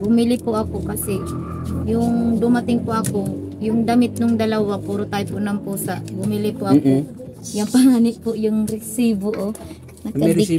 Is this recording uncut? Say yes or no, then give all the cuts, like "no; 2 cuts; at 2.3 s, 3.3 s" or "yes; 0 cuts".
yes; 0 cuts